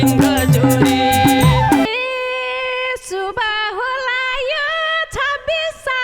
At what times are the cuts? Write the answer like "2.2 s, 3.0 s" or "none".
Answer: 1.9 s